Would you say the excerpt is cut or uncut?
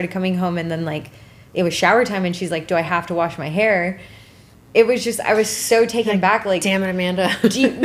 uncut